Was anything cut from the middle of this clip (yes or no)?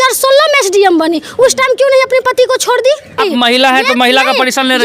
yes